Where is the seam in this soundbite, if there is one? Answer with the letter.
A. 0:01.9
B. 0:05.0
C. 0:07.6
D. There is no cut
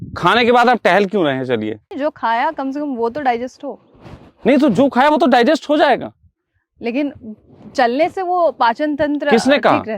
A